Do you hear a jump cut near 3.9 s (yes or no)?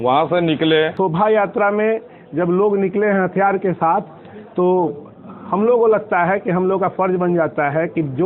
no